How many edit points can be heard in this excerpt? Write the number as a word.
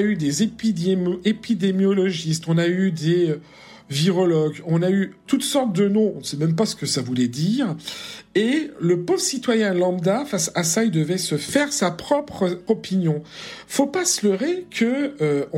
two